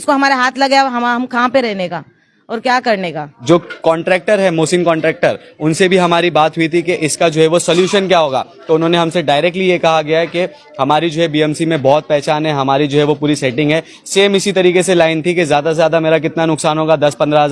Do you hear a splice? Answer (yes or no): yes